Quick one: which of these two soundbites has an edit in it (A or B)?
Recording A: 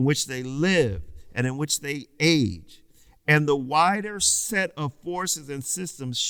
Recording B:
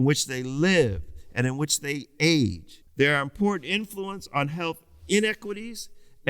B